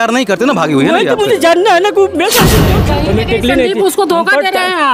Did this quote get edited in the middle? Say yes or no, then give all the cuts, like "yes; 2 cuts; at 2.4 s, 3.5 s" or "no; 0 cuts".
yes; 1 cut; at 2.8 s